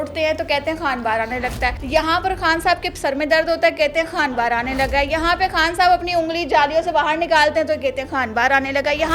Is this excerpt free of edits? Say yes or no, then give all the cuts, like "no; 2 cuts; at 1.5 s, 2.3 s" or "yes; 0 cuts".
no; 1 cut; at 1.8 s